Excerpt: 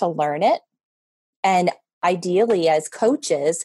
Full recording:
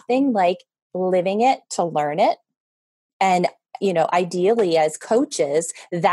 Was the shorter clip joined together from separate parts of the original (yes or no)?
yes